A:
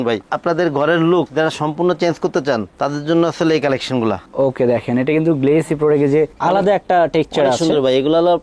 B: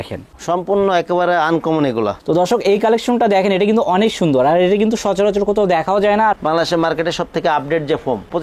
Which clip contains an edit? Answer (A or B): B